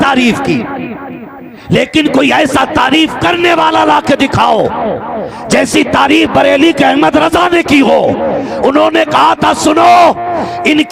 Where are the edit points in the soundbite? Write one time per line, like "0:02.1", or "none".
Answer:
none